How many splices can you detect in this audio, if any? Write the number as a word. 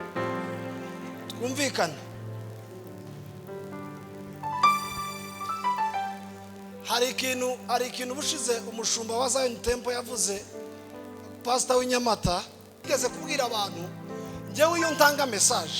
one